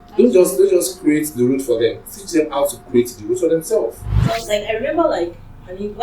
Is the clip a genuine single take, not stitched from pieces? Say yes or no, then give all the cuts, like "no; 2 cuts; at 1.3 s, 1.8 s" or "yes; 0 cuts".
no; 1 cut; at 4.1 s